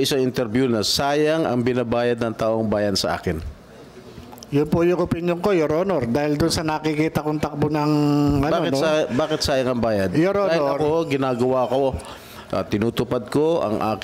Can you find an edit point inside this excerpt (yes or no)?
no